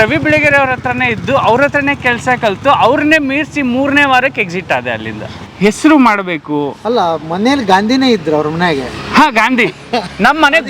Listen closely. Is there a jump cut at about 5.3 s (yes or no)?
yes